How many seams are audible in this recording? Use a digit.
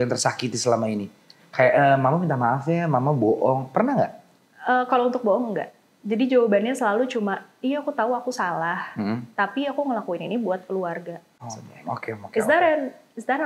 1